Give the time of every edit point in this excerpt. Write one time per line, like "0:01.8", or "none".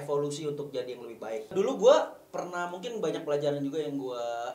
0:01.5